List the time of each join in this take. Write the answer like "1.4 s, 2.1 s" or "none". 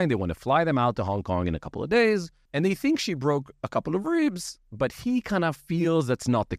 2.4 s